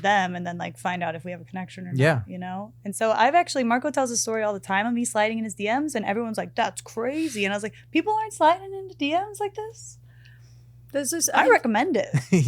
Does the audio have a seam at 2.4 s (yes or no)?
no